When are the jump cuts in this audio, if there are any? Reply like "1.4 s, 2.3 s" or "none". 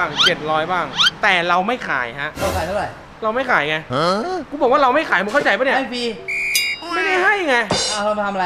3.0 s, 4.5 s